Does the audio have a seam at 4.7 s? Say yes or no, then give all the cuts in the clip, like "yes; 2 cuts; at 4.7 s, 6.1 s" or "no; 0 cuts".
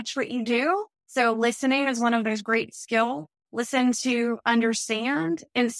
no; 2 cuts; at 1.0 s, 3.3 s